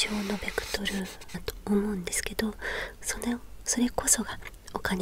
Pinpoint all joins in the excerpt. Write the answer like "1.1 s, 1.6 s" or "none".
1.5 s